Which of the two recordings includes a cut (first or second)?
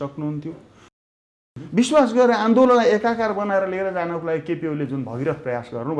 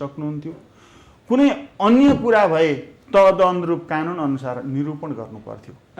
first